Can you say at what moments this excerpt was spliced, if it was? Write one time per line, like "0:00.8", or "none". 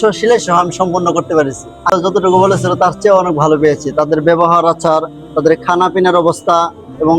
0:01.9